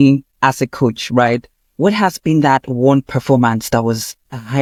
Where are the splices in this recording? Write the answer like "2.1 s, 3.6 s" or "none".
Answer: none